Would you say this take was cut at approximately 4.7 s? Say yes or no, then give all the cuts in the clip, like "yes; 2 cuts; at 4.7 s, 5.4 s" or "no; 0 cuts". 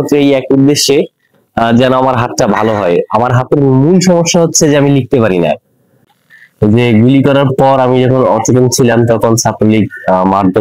no; 1 cut; at 6.2 s